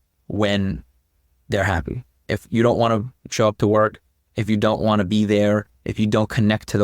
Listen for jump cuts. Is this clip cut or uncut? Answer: cut